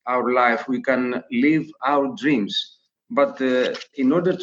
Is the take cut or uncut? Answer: cut